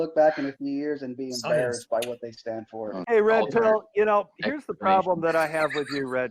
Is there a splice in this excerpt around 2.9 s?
yes; 1 cut; at 2.9 s

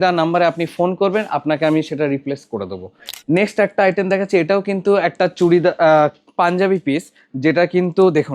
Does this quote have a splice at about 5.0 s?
no; 1 cut; at 3.1 s

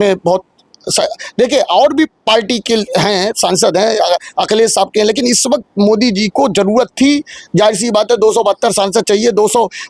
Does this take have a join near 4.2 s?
no; 0 cuts

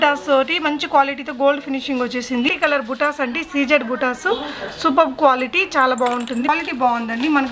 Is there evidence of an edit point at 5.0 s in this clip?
no; 2 cuts; at 2.5 s, 6.5 s

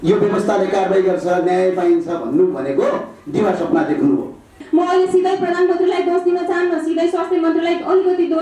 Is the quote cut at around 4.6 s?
yes; 1 cut; at 4.6 s

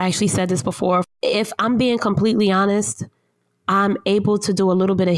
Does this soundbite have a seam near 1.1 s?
yes; 1 cut; at 1.1 s

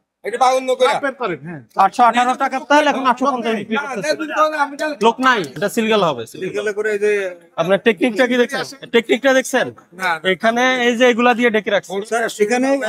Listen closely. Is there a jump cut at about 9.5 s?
no; 1 cut; at 5.5 s

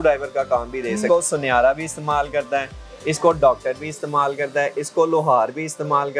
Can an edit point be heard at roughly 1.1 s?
yes; 1 cut; at 1.1 s

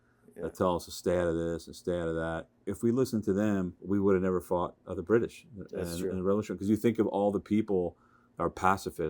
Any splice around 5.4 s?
no; 2 cuts; at 2.7 s, 3.8 s

